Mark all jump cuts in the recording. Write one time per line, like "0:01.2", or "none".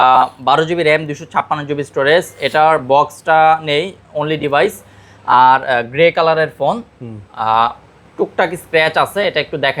none